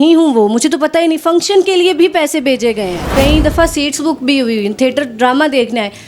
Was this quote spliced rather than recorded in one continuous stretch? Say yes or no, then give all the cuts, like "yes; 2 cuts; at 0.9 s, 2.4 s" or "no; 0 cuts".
yes; 1 cut; at 3.1 s